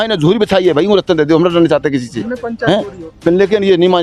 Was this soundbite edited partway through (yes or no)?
no